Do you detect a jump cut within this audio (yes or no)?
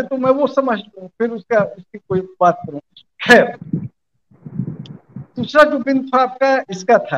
no